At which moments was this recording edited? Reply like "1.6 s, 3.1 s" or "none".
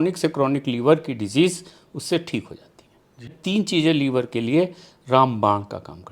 3.3 s